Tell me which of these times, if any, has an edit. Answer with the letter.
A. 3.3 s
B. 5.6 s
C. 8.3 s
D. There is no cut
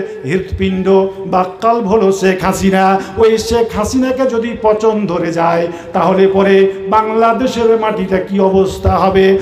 D